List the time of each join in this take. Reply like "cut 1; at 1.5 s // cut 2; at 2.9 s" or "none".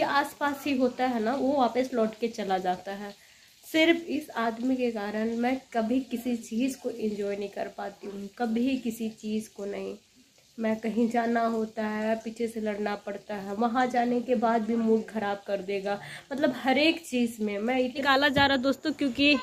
cut 1; at 18.0 s

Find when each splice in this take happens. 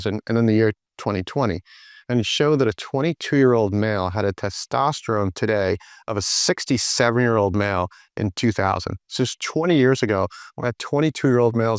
none

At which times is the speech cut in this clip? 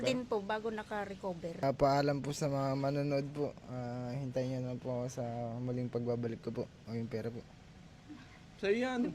cut 1; at 1.6 s

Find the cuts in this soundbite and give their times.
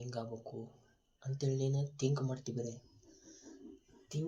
none

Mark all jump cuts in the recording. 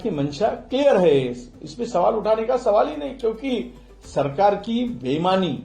none

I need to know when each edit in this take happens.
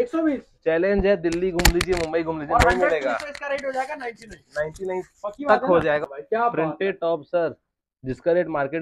cut 1; at 6.0 s

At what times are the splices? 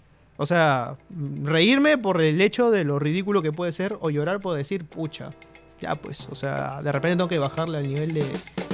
none

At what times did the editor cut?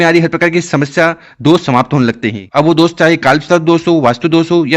cut 1; at 2.3 s

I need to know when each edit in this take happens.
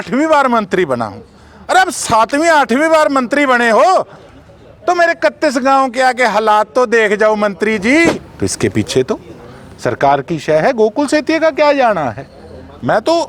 cut 1; at 8.3 s

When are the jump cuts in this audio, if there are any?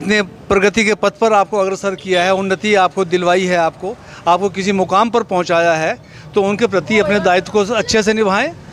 none

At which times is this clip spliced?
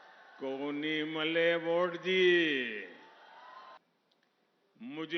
cut 1; at 3.8 s

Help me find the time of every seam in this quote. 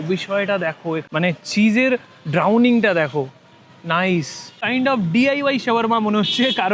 cut 1; at 4.6 s

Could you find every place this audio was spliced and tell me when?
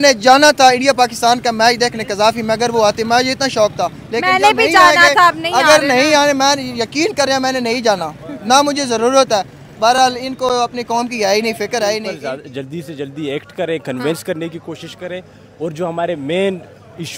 cut 1; at 12.1 s

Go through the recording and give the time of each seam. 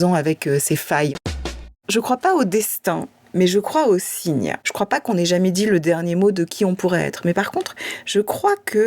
cut 1; at 1.7 s // cut 2; at 4.6 s

